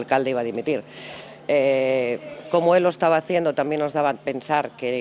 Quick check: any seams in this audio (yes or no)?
no